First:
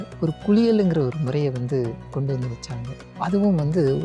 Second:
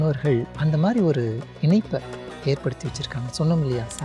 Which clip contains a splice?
first; 1 cut; at 3.0 s

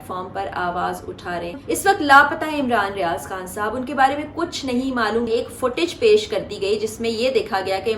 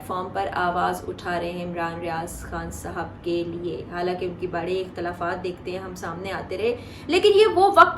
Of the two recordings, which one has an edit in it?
first; 2 cuts; at 1.5 s, 5.3 s

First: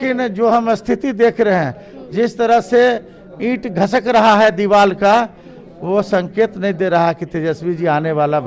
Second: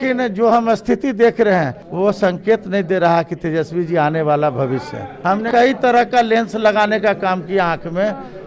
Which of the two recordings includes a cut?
second; 2 cuts; at 1.8 s, 5.4 s

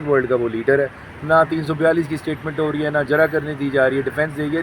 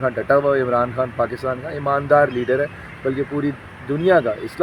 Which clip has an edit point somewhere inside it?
first; 1 cut; at 1.1 s

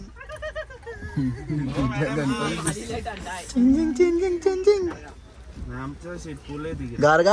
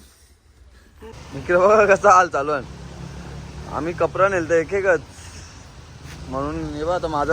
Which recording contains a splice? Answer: second; 1 cut; at 1.2 s

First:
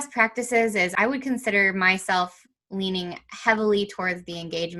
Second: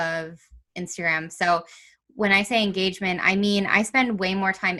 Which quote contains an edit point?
first; 1 cut; at 0.9 s

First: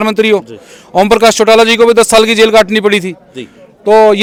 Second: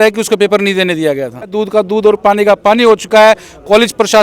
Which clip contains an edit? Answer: second; 1 cut; at 1.5 s

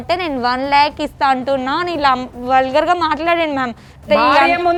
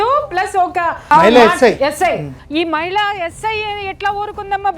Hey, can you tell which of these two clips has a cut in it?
second; 2 cuts; at 1.0 s, 2.3 s

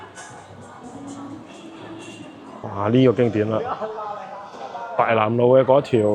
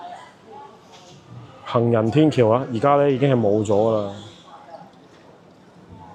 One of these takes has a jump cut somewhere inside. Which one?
first; 1 cut; at 2.5 s

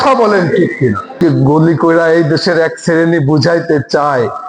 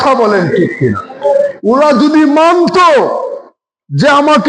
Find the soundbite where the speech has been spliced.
first; 1 cut; at 1.2 s

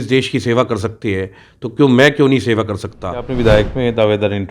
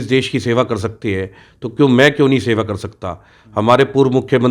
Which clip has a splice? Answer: first; 1 cut; at 3.3 s

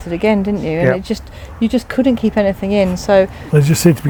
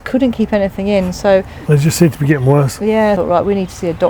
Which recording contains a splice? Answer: second; 1 cut; at 3.2 s

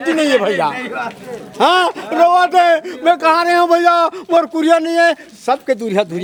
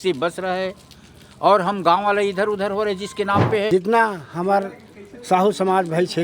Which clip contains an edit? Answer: second; 1 cut; at 3.7 s

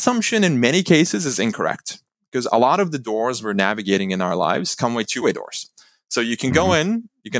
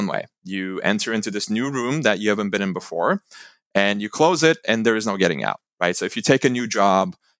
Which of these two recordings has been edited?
first; 1 cut; at 5.1 s

